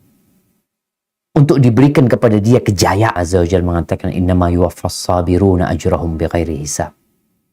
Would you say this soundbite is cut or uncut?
cut